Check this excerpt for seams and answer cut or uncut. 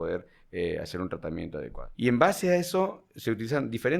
cut